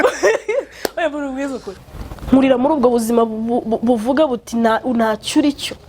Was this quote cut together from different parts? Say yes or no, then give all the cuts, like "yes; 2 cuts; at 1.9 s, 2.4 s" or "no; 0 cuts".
yes; 1 cut; at 1.7 s